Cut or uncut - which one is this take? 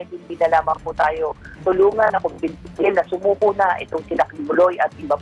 uncut